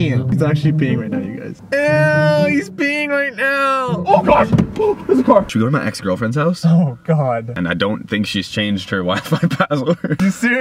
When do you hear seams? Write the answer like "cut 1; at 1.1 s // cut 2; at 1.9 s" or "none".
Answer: cut 1; at 5.4 s // cut 2; at 7.5 s

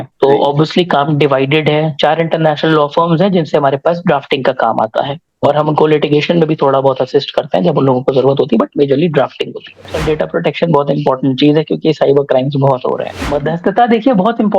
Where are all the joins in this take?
cut 1; at 9.9 s // cut 2; at 13.1 s

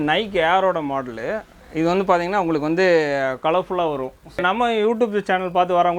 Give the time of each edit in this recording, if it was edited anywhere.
cut 1; at 4.4 s

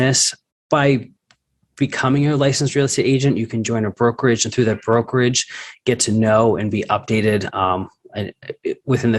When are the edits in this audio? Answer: none

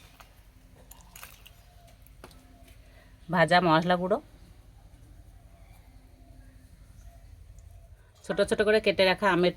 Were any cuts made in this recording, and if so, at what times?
cut 1; at 8.1 s

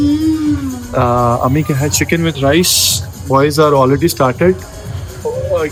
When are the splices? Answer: none

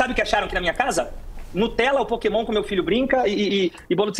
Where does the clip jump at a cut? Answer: none

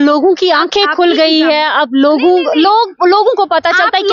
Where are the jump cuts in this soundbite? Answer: none

